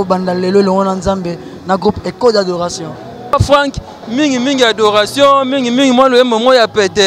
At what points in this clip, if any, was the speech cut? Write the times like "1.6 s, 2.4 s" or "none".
3.3 s